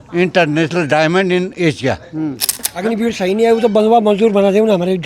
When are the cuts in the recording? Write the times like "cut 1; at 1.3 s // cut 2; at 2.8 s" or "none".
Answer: cut 1; at 2.6 s